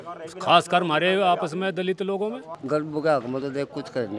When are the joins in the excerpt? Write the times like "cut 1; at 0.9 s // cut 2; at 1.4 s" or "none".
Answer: cut 1; at 2.5 s